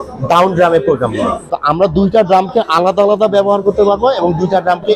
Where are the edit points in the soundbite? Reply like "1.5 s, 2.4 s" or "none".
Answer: 1.5 s